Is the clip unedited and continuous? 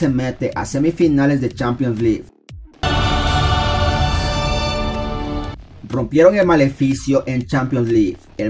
no; 2 cuts; at 2.4 s, 5.6 s

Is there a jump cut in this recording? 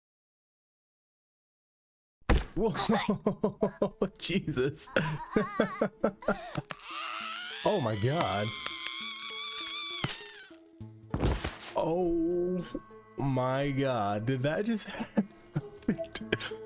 no; 0 cuts

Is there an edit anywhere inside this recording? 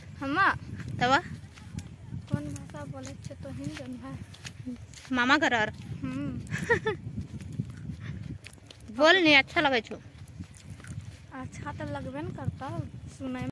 no; 0 cuts

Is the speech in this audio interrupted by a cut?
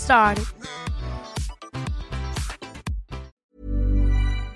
yes; 1 cut; at 3.3 s

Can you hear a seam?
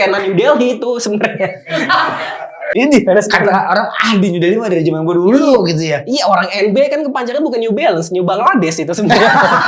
yes; 1 cut; at 2.7 s

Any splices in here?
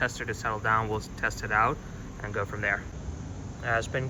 no; 0 cuts

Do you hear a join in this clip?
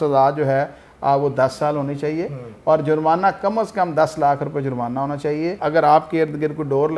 yes; 1 cut; at 5.6 s

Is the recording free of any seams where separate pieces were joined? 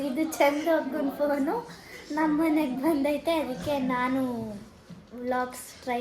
yes; 0 cuts

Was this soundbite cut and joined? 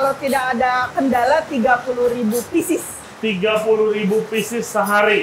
no; 0 cuts

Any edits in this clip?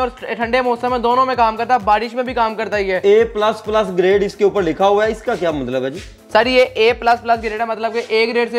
no; 0 cuts

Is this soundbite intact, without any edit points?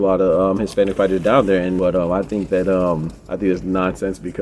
no; 1 cut; at 1.8 s

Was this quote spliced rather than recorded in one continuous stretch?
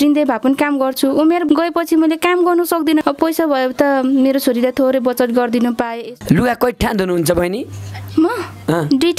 yes; 3 cuts; at 1.4 s, 3.0 s, 6.0 s

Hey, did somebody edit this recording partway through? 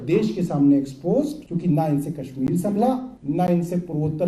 yes; 2 cuts; at 1.4 s, 3.1 s

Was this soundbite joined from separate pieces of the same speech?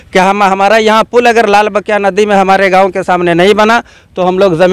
no; 0 cuts

